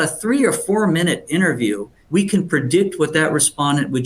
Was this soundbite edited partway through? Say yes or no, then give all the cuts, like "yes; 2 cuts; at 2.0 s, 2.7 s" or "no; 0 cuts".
yes; 1 cut; at 2.0 s